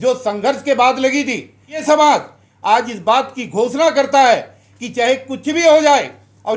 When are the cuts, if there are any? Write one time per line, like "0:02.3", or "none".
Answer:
0:01.8